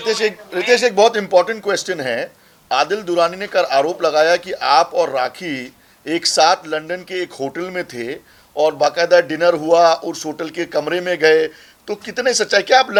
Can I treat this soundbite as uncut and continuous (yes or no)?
yes